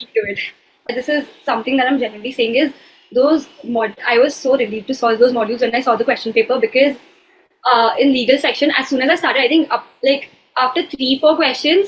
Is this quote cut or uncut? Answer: cut